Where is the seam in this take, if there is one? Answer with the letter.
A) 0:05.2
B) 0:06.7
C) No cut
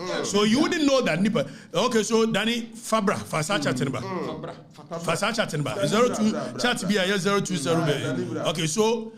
C